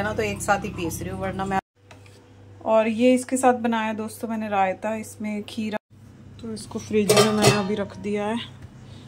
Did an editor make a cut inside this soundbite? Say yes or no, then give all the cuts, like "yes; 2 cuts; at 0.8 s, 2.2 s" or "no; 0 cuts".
yes; 2 cuts; at 1.6 s, 5.8 s